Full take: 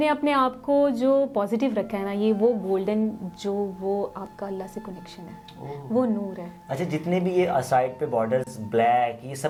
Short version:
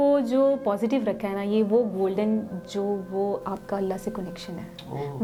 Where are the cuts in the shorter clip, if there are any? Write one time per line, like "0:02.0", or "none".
none